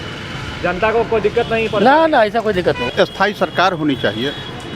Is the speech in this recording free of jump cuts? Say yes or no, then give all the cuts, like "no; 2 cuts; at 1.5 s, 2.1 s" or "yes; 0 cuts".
no; 1 cut; at 2.8 s